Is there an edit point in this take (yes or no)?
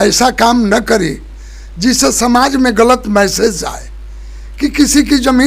no